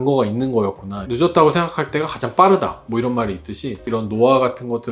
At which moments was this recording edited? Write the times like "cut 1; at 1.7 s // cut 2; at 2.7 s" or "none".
cut 1; at 1.1 s // cut 2; at 3.9 s